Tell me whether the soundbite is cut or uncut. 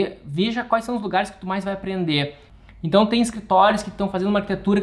cut